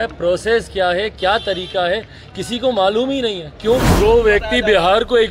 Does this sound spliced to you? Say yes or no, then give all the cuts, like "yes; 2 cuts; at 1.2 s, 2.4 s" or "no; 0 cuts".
yes; 1 cut; at 3.9 s